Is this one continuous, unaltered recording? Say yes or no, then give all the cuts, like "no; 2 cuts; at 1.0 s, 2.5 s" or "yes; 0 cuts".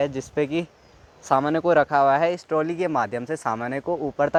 yes; 0 cuts